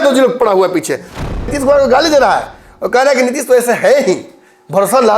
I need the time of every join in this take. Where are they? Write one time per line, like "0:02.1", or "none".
0:01.3